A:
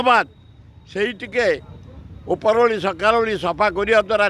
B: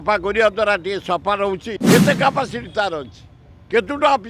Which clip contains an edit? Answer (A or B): B